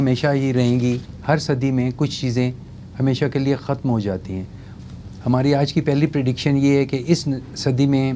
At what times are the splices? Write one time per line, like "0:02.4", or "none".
none